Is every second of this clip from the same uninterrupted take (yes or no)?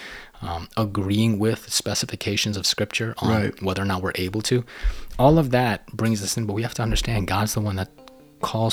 yes